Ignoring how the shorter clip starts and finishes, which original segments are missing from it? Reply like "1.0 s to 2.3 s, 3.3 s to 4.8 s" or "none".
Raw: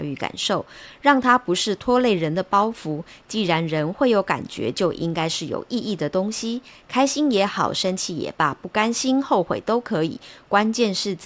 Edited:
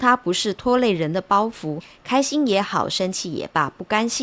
3.1 s to 6.7 s